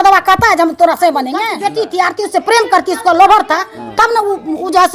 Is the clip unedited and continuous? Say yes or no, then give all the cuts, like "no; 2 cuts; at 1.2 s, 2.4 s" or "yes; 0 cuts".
no; 1 cut; at 1.5 s